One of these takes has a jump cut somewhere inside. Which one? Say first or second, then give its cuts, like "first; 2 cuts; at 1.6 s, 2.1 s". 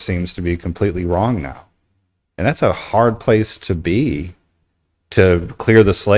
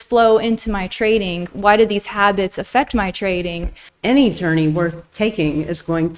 second; 1 cut; at 3.9 s